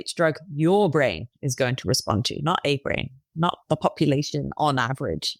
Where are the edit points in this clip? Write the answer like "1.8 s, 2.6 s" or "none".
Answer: none